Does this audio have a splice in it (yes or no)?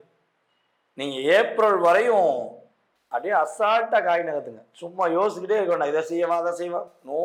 no